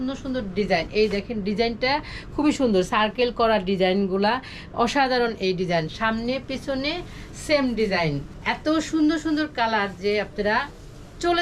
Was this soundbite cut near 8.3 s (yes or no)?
yes